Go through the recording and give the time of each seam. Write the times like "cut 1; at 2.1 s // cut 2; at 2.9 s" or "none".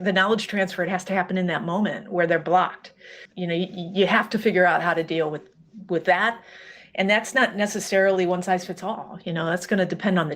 cut 1; at 3.2 s